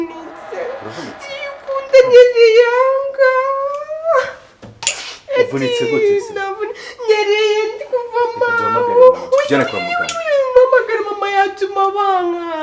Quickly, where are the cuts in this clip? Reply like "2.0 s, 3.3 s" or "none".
none